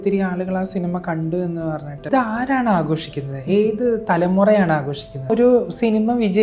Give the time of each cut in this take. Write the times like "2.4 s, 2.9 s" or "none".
2.1 s, 5.3 s

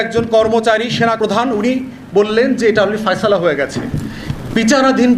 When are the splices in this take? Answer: 1.2 s

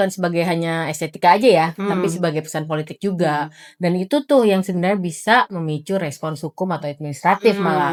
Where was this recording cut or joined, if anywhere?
none

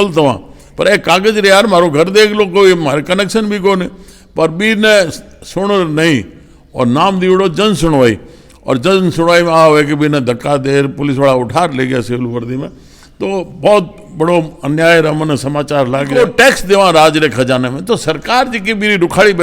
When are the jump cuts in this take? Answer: 16.1 s

